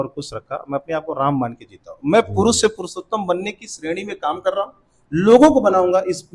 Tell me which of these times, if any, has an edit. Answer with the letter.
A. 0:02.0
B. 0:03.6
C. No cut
C